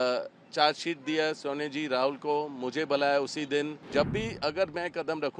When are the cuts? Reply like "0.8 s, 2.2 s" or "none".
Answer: 3.8 s

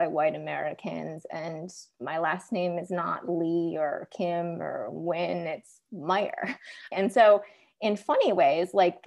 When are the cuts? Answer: 6.9 s

